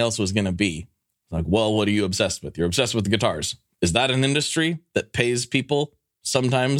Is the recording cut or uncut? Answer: uncut